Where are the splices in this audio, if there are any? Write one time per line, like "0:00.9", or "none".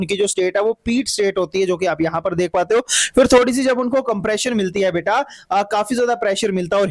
none

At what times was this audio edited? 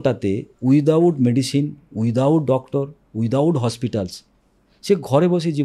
none

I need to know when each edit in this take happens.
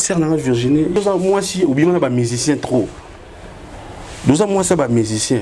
0:00.9

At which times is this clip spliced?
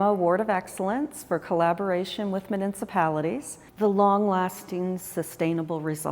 0:03.6

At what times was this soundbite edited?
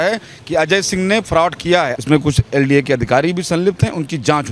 0:01.9

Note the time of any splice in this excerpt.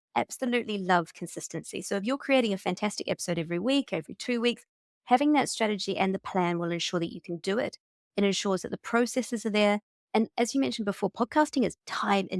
none

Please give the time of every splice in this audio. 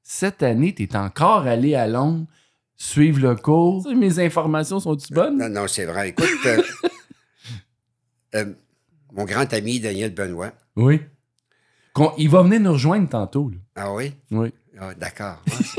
0:03.8

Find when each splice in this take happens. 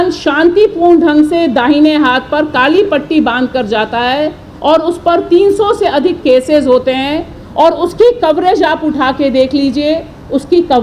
none

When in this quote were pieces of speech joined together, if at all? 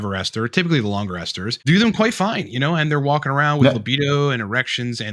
0:01.7

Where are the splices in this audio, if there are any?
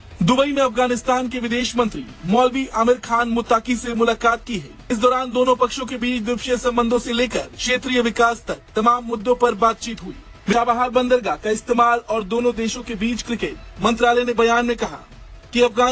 0:04.8
0:10.5

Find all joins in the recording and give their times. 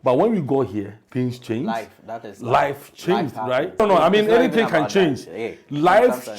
0:03.8

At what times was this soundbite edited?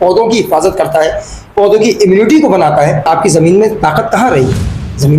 0:03.1

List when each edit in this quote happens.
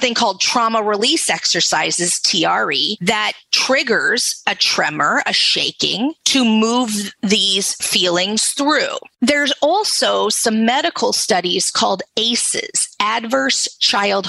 0:04.3

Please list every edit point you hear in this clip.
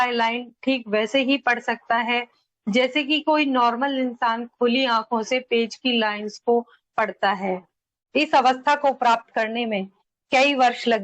none

